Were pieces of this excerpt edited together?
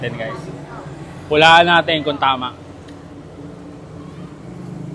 no; 0 cuts

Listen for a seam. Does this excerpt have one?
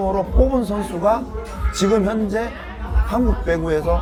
no; 0 cuts

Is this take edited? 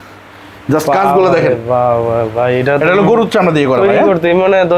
no; 0 cuts

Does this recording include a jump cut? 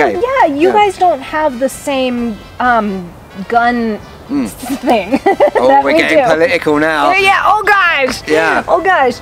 no; 0 cuts

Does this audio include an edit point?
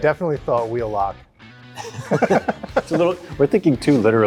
no; 0 cuts

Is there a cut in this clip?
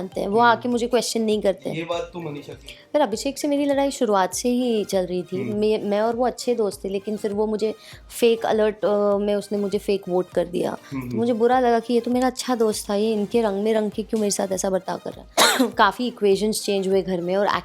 yes; 1 cut; at 15.2 s

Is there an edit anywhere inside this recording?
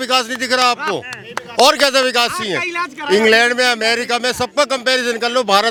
no; 0 cuts

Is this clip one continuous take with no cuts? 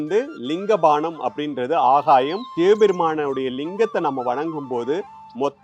no; 1 cut; at 2.4 s

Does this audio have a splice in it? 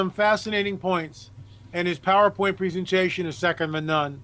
no; 0 cuts

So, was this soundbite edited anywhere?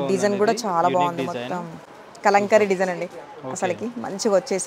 no; 0 cuts

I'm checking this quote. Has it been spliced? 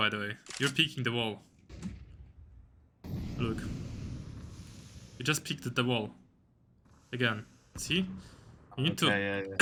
no; 0 cuts

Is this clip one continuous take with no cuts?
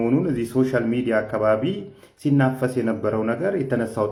yes; 0 cuts

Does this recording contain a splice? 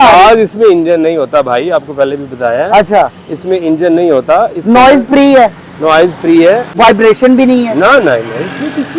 yes; 1 cut; at 6.7 s

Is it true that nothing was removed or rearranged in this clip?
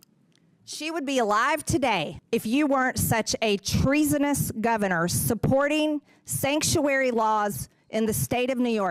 no; 1 cut; at 2.2 s

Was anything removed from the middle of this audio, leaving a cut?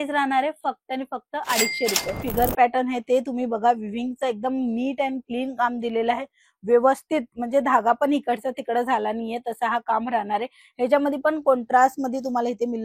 yes; 1 cut; at 2.2 s

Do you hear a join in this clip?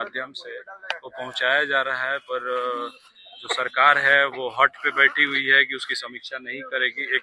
no; 0 cuts

